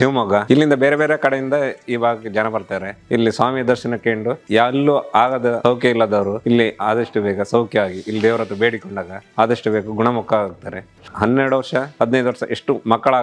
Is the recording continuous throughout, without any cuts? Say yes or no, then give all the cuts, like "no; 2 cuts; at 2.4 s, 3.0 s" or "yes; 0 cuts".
yes; 0 cuts